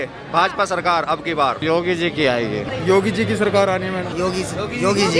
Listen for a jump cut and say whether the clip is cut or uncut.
cut